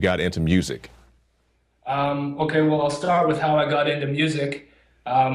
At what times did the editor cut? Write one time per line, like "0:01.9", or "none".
0:03.6

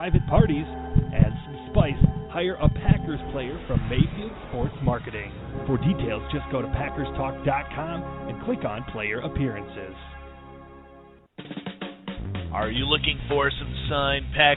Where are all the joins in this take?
0:11.2

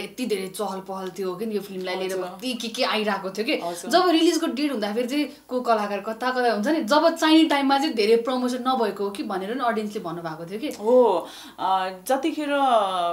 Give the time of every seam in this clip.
none

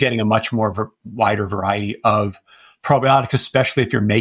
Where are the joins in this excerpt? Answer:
0:01.0

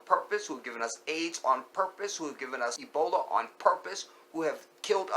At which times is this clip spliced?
0:02.8

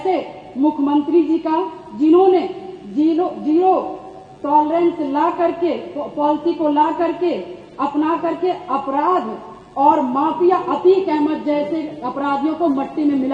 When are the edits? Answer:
none

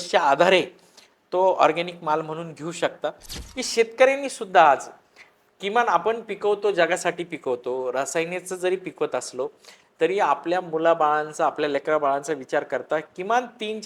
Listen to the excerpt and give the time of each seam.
0:03.3

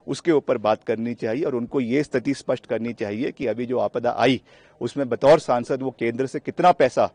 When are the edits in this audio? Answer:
none

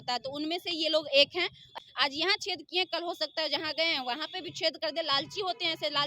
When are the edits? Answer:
0:01.7

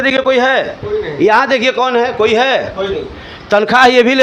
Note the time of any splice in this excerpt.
none

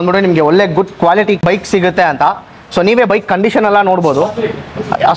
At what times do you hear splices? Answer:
0:01.4

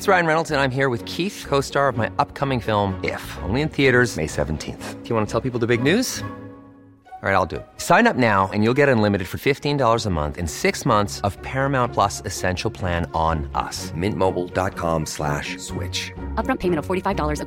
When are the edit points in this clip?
none

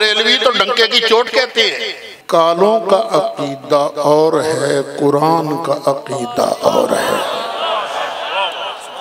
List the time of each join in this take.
0:02.1

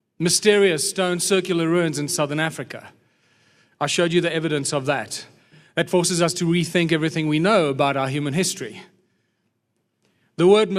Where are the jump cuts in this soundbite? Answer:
0:03.1

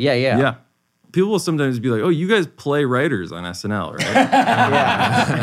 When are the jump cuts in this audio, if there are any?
0:01.0

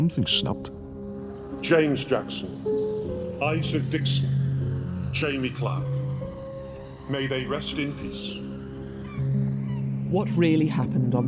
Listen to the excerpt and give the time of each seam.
0:07.7

